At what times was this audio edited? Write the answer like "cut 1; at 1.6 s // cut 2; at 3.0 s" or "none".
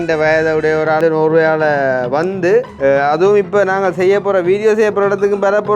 cut 1; at 1.0 s // cut 2; at 2.7 s